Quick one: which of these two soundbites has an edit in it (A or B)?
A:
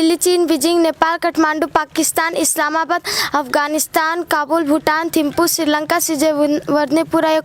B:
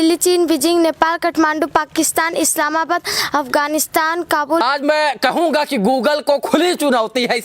B